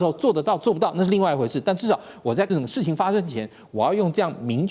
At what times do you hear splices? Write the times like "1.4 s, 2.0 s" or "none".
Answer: 2.5 s

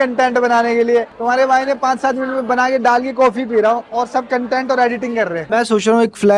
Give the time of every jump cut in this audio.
5.5 s

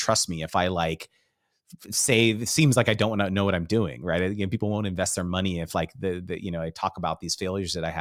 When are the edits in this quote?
none

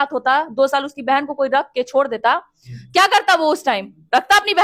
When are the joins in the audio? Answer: none

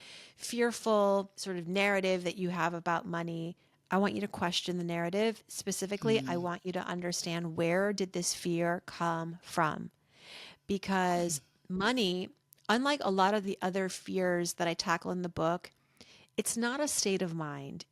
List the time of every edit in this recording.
1.4 s

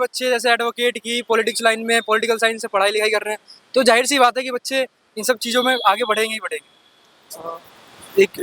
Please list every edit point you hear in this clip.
none

